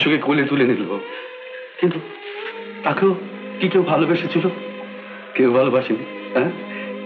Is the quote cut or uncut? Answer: uncut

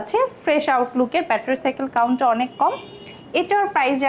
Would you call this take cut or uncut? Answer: uncut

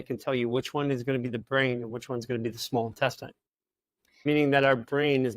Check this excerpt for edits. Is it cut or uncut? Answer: cut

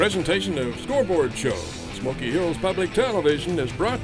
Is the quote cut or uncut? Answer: uncut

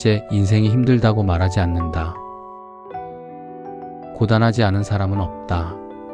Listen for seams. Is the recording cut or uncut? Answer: cut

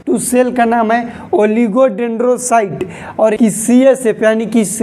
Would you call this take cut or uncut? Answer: cut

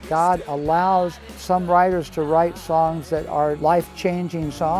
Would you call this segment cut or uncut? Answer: cut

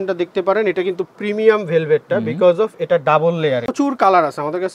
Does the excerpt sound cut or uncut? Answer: cut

